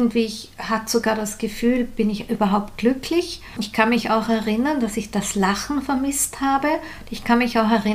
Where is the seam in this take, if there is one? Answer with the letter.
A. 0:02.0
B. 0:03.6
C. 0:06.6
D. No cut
B